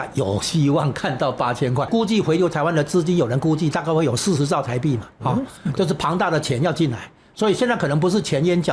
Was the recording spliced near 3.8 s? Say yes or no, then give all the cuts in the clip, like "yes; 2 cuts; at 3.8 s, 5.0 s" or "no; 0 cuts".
no; 1 cut; at 1.9 s